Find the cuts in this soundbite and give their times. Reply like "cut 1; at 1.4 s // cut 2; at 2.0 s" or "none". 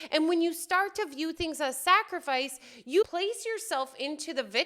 cut 1; at 3.0 s